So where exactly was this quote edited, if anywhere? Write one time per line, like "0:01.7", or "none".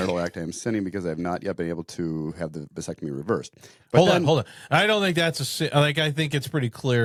none